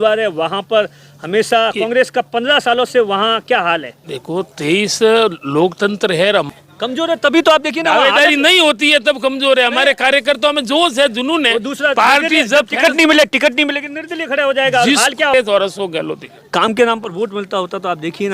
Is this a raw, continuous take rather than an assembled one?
no; 2 cuts; at 6.5 s, 15.3 s

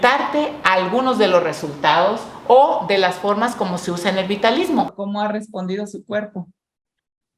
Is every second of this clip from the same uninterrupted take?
no; 1 cut; at 5.0 s

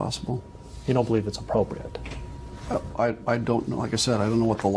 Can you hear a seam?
no; 0 cuts

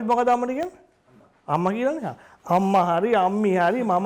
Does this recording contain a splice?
yes; 1 cut; at 2.3 s

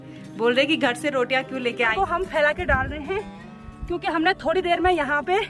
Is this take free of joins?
no; 1 cut; at 1.9 s

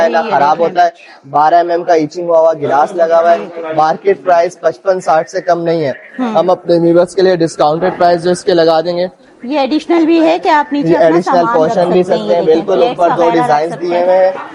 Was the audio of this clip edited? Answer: no; 0 cuts

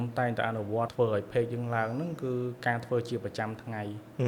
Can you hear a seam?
yes; 1 cut; at 0.9 s

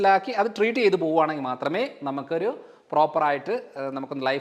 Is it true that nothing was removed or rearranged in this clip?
yes; 0 cuts

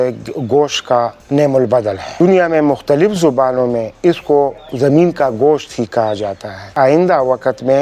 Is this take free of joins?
no; 2 cuts; at 2.1 s, 6.7 s

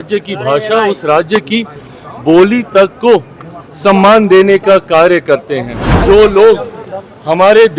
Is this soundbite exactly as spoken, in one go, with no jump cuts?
no; 1 cut; at 6.0 s

